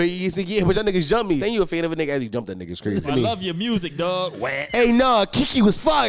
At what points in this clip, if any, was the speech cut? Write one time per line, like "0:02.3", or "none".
0:01.4
0:03.1
0:04.6